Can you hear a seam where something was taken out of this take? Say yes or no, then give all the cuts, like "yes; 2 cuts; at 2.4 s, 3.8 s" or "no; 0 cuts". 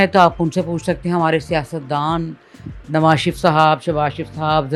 no; 0 cuts